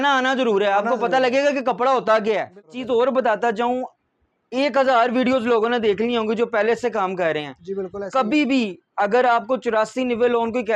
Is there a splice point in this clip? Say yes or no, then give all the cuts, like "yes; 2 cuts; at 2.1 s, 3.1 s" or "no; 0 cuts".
yes; 1 cut; at 2.7 s